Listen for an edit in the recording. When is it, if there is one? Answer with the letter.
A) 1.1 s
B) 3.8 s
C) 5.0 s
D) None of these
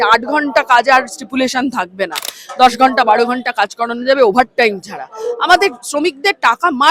D